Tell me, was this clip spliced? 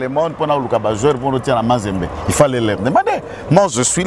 no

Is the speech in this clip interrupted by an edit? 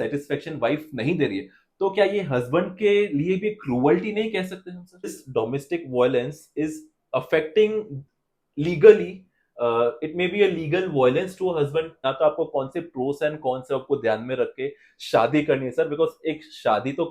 yes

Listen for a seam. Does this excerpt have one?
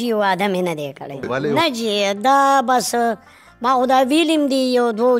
yes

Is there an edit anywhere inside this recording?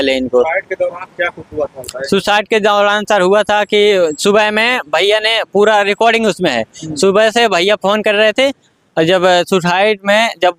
no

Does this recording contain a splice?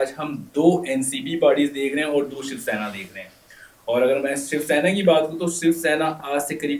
no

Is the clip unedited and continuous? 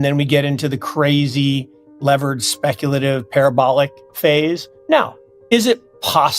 no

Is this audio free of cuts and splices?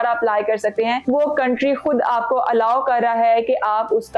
no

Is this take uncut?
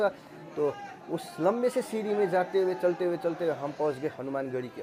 yes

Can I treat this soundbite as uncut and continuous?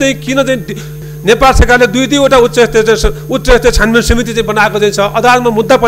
no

